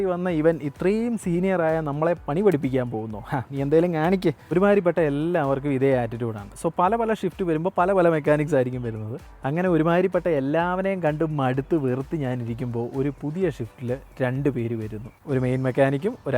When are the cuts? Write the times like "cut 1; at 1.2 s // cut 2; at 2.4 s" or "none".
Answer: none

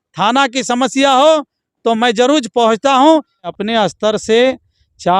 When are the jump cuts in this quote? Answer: cut 1; at 3.5 s

